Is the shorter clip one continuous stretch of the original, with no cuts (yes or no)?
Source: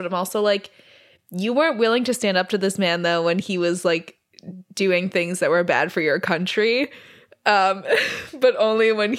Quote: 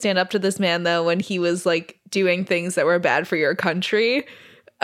no